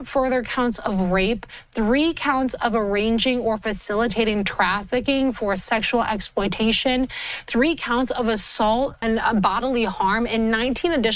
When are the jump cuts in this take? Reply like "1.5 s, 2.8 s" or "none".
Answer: none